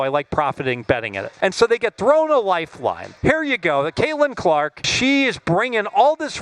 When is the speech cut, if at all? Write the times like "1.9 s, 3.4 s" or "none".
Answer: 1.2 s, 3.1 s, 4.8 s